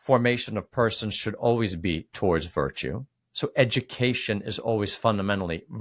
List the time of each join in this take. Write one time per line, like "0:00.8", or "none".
none